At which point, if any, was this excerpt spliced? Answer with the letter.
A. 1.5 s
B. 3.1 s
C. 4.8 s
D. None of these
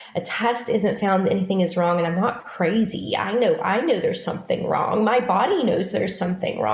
D